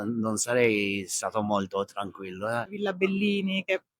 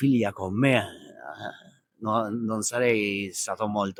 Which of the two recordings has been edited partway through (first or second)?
first